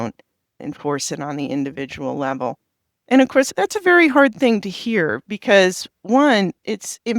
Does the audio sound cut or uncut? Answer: uncut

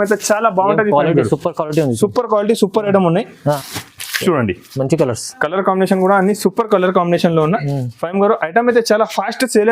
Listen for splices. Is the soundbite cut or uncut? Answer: cut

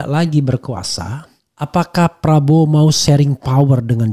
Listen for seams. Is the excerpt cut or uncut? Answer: uncut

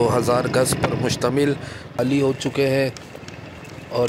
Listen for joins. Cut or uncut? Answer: cut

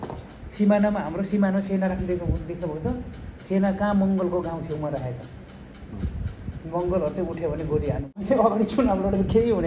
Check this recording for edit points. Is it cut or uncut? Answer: cut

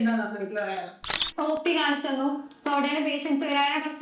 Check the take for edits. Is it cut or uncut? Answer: cut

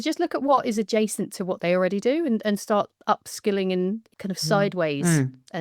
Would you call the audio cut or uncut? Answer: cut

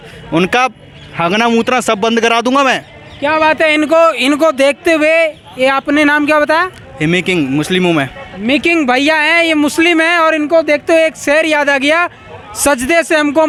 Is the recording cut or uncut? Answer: uncut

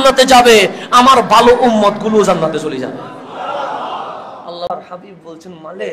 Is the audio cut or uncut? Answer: cut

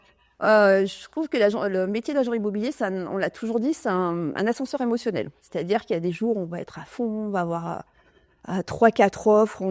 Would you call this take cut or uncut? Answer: uncut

